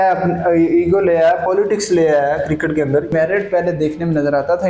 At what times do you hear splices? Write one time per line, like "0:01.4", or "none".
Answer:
0:03.1